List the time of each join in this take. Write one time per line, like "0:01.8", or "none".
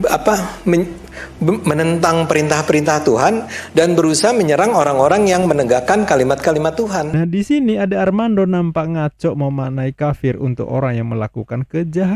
0:07.1